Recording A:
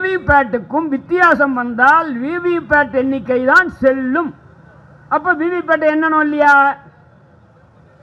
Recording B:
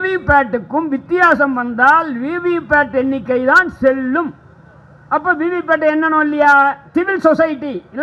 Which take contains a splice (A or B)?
B